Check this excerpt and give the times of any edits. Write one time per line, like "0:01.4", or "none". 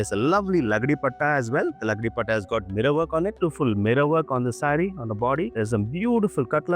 0:03.4
0:05.5

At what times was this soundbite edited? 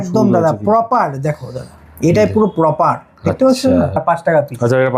0:04.0

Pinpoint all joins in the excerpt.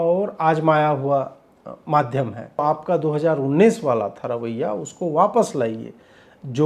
0:02.6

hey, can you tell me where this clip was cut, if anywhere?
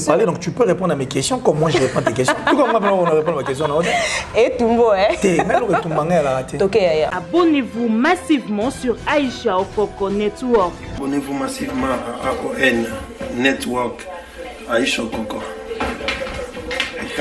0:07.1
0:11.0

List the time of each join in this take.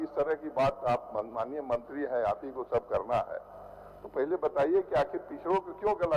none

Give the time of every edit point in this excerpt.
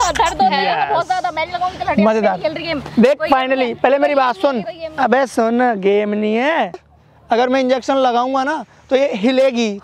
0:06.9

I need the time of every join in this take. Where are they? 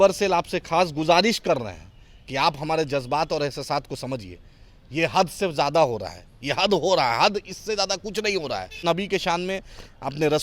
0:08.8

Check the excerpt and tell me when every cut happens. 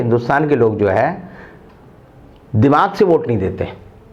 none

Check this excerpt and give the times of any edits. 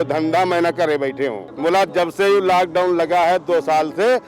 0:01.5

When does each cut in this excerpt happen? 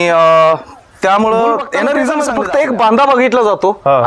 0:02.1

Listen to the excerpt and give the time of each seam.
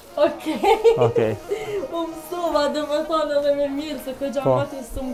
none

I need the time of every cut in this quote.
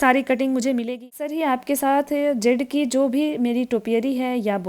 0:01.2

